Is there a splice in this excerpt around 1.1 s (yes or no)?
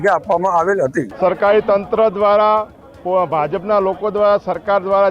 yes